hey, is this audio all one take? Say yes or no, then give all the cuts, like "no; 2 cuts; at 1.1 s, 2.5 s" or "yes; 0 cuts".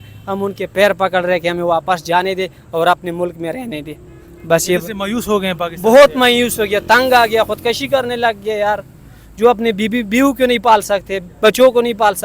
yes; 0 cuts